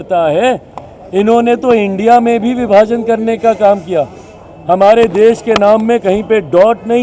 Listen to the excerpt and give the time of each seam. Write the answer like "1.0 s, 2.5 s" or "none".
none